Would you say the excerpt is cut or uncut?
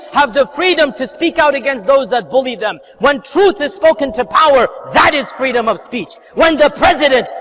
uncut